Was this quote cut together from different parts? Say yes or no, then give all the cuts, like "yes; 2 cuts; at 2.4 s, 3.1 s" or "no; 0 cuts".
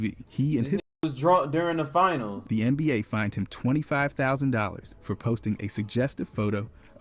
yes; 1 cut; at 2.4 s